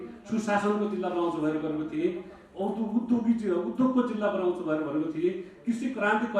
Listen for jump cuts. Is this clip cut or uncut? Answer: uncut